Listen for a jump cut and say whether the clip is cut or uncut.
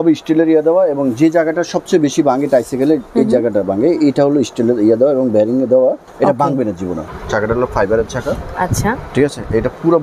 cut